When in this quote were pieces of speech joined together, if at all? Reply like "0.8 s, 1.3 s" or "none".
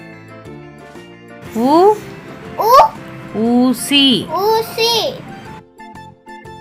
none

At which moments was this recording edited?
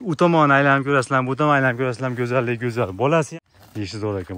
3.3 s

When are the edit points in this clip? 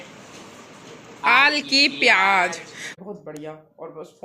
2.9 s

